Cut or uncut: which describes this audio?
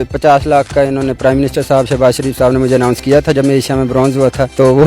uncut